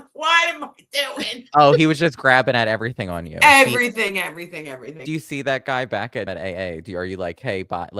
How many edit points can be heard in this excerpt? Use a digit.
2